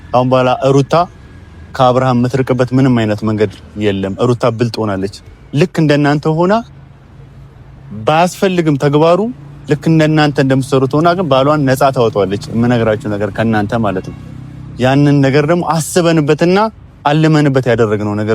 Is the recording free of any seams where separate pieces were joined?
yes; 0 cuts

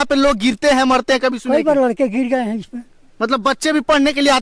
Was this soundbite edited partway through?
no; 0 cuts

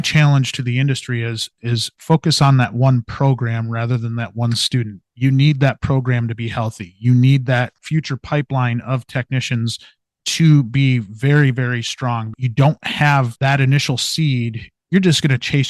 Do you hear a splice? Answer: yes; 4 cuts; at 7.8 s, 12.3 s, 13.3 s, 14.7 s

